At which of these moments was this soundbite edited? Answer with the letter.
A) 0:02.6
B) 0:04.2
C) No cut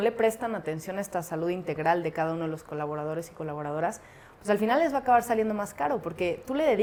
C